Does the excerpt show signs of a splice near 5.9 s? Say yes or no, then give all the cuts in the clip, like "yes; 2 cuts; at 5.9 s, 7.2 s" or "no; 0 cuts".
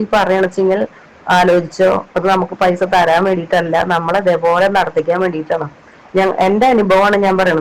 no; 0 cuts